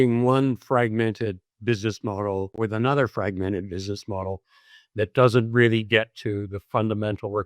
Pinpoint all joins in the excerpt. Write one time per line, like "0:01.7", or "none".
0:02.5